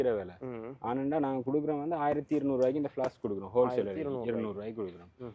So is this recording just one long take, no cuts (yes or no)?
yes